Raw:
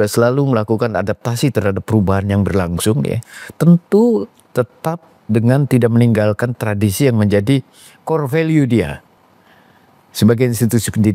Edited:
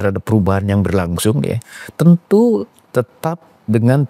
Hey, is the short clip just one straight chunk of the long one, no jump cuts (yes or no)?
yes